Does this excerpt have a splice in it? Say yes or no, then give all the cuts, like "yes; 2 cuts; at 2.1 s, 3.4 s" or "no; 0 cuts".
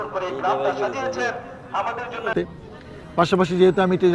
yes; 1 cut; at 2.3 s